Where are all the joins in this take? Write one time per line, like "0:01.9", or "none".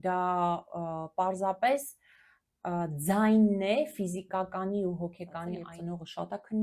0:05.7